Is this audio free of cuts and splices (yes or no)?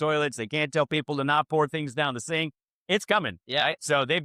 yes